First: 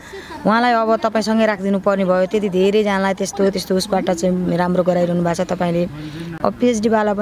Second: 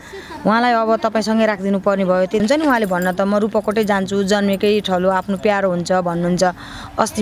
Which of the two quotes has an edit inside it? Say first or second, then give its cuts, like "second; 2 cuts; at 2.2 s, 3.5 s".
second; 1 cut; at 2.4 s